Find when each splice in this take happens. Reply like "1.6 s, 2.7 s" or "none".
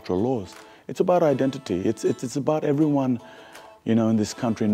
none